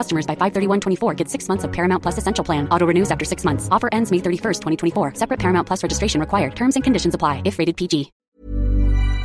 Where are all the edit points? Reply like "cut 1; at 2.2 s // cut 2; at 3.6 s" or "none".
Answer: cut 1; at 8.2 s